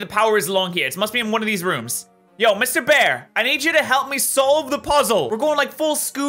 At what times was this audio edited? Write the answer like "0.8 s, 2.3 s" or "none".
5.3 s

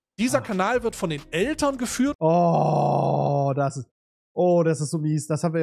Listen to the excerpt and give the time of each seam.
2.1 s

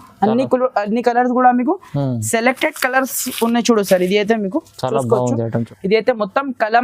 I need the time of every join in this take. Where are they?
5.6 s

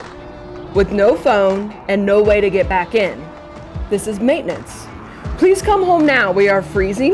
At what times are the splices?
none

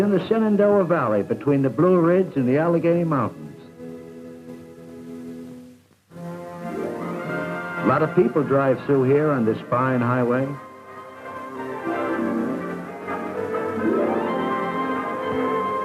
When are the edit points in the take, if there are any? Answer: 2.9 s

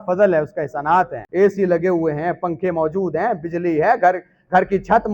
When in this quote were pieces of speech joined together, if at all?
1.2 s

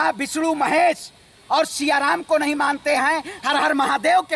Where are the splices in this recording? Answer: none

